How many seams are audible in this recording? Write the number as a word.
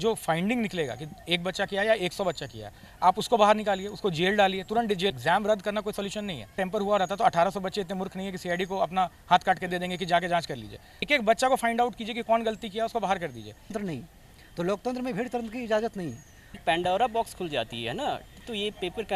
five